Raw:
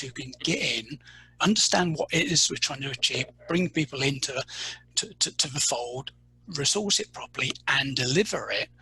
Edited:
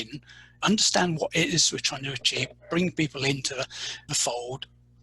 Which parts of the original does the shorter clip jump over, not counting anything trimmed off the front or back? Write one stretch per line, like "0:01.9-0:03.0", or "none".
0:04.8-0:05.5